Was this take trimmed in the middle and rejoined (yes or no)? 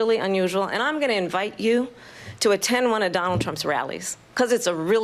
no